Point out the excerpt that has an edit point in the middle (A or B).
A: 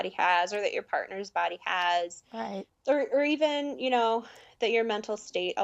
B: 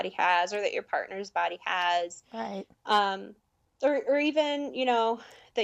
A